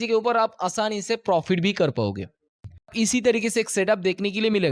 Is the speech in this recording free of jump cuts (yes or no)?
no